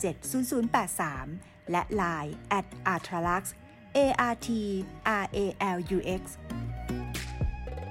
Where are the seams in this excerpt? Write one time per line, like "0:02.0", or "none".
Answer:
0:06.3

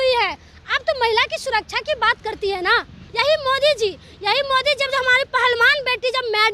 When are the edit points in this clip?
0:03.0

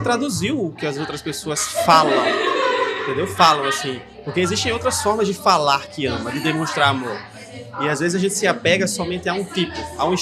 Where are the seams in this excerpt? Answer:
none

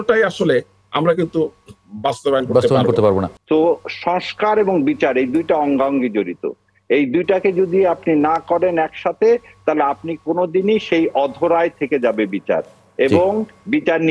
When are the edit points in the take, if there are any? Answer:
0:03.3

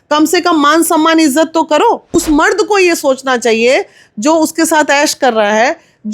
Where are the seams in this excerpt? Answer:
0:02.1

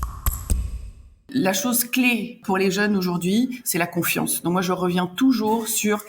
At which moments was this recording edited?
0:01.2
0:02.4

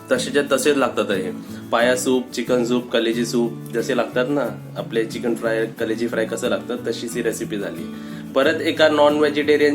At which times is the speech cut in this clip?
0:01.5

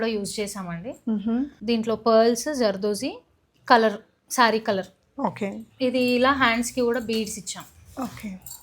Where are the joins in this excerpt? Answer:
0:01.6

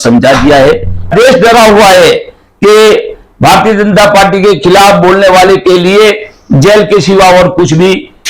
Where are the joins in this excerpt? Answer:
0:01.1

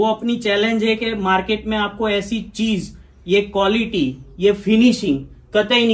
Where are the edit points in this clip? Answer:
none

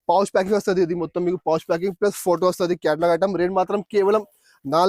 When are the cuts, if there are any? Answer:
none

